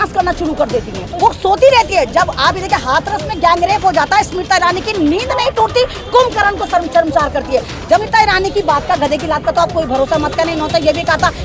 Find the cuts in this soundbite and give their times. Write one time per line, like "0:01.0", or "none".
0:01.1
0:08.0